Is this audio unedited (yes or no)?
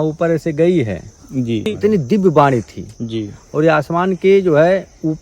no